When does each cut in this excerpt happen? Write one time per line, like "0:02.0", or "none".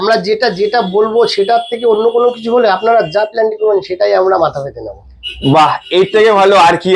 none